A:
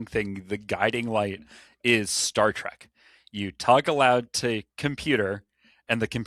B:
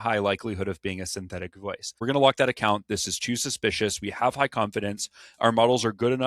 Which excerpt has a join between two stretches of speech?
B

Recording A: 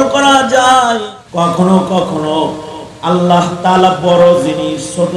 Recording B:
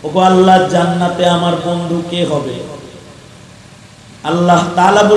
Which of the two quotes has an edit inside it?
A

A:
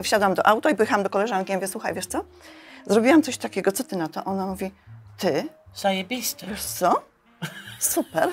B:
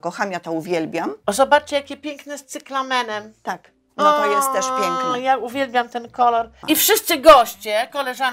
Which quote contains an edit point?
B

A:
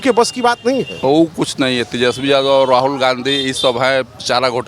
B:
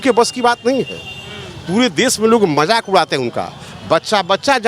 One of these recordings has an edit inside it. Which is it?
A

